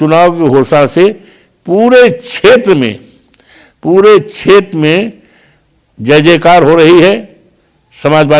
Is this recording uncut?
yes; 0 cuts

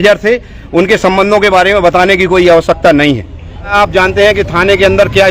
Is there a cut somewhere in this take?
yes; 1 cut; at 3.7 s

